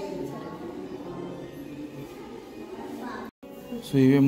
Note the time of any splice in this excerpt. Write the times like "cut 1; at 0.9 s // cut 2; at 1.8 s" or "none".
cut 1; at 3.3 s